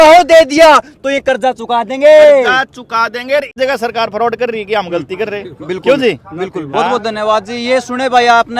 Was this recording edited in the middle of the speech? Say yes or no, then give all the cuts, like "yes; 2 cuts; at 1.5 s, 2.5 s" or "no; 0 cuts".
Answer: yes; 1 cut; at 3.5 s